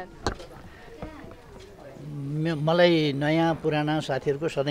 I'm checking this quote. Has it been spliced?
no; 0 cuts

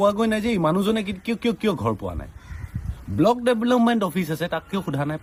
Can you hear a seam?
no; 0 cuts

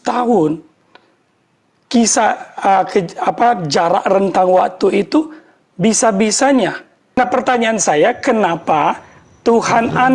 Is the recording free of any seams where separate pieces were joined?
no; 1 cut; at 7.2 s

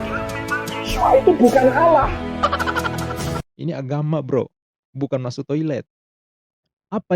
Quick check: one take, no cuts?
no; 1 cut; at 3.4 s

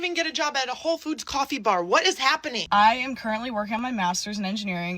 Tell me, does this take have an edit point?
yes; 1 cut; at 2.5 s

